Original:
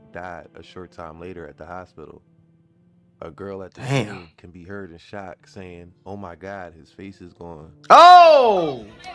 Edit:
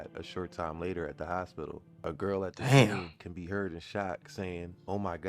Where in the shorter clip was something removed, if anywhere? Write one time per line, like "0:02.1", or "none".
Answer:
0:02.0

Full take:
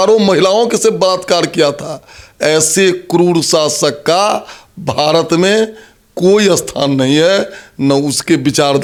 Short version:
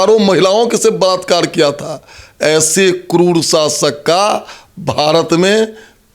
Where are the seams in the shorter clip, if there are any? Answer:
none

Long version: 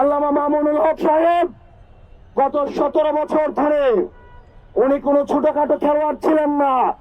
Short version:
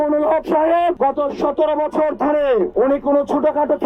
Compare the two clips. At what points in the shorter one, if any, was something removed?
0:01.0
0:02.7

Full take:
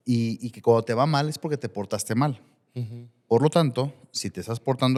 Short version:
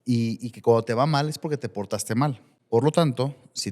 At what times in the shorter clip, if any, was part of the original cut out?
0:02.5

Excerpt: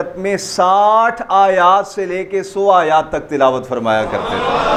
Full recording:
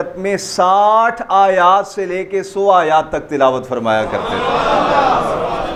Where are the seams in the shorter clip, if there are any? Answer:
none

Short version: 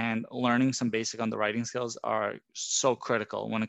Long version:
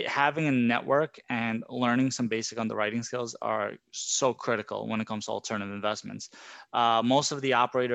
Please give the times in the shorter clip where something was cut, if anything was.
none

